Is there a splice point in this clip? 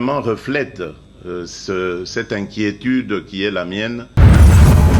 yes; 1 cut; at 4.0 s

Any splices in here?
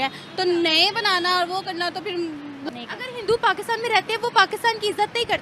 yes; 1 cut; at 2.6 s

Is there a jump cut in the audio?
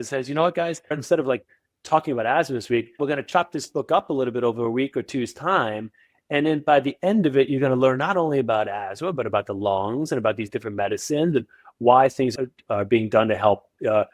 yes; 3 cuts; at 1.0 s, 3.0 s, 12.4 s

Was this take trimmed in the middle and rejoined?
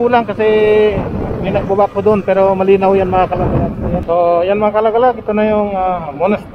yes; 1 cut; at 4.0 s

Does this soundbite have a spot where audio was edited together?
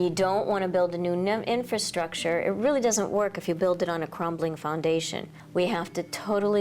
yes; 1 cut; at 5.3 s

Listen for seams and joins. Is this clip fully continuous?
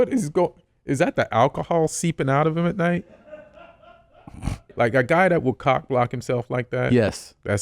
no; 1 cut; at 4.7 s

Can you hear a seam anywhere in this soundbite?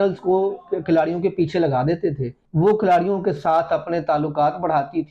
yes; 1 cut; at 2.4 s

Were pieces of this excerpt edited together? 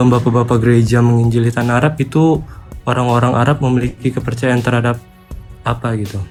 no; 0 cuts

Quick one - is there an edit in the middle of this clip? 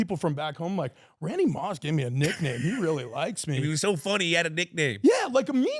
yes; 1 cut; at 3.7 s

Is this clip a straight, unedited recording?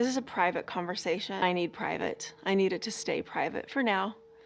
no; 1 cut; at 1.4 s

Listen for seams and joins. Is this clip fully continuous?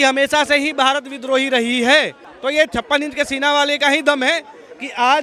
no; 1 cut; at 2.2 s

